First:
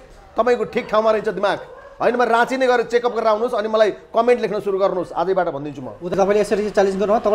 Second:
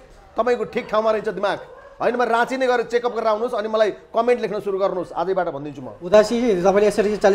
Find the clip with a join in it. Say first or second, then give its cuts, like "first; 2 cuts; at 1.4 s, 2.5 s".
first; 1 cut; at 6.1 s